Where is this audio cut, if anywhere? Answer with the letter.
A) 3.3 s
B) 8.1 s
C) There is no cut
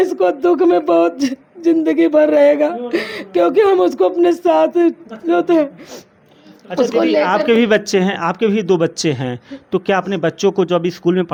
C